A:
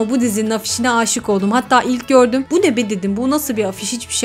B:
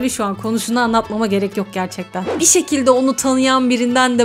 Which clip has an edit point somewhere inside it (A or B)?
B